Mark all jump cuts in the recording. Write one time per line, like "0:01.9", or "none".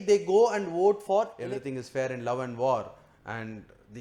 0:01.3

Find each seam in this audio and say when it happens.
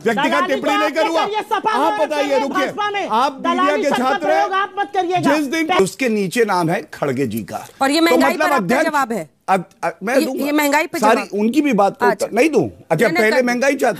0:05.8

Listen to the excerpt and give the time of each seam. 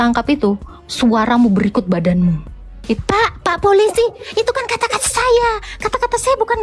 0:03.0

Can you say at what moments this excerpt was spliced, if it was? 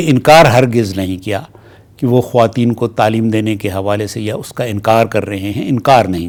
none

